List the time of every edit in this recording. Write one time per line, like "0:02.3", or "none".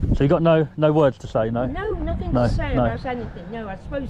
none